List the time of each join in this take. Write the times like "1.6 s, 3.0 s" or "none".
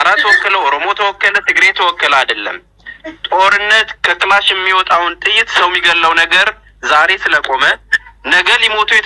none